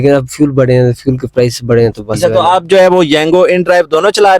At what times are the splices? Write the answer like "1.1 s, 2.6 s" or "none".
2.2 s